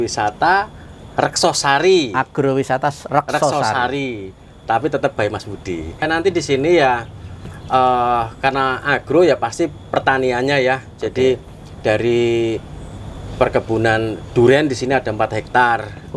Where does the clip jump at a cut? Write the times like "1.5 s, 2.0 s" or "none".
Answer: 6.0 s

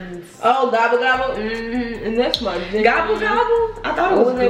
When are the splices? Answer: none

